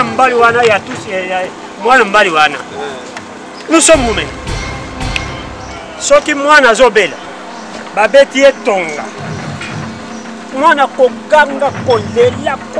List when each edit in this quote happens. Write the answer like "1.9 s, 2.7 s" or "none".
4.9 s